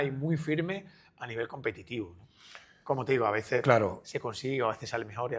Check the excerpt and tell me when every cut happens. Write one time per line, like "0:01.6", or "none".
none